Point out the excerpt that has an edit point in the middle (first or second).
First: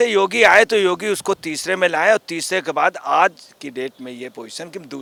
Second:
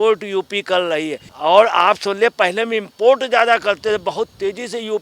second